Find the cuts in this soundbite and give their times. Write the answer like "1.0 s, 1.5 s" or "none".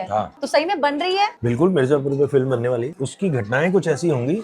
2.9 s